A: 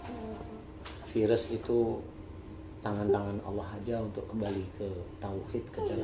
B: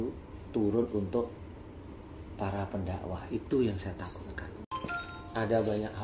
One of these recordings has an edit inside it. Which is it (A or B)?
B